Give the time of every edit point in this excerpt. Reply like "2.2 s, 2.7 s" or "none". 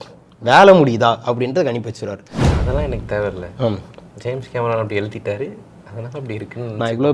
none